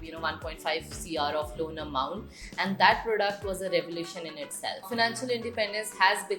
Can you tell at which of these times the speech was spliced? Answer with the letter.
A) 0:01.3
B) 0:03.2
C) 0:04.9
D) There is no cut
C